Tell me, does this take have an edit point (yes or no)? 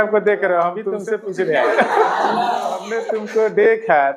yes